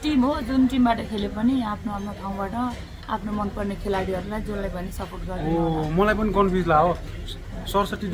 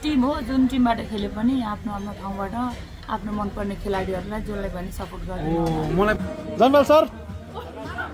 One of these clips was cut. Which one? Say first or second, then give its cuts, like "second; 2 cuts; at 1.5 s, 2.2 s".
second; 1 cut; at 6.2 s